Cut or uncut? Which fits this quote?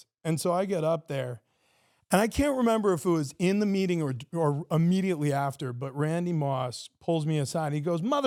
uncut